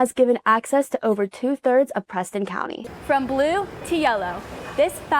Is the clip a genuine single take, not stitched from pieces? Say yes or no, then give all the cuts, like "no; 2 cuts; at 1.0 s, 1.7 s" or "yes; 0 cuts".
no; 1 cut; at 2.9 s